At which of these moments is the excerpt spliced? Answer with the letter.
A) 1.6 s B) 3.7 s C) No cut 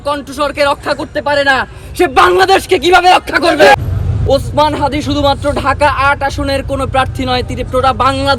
B